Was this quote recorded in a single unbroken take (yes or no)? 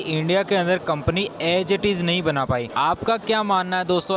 yes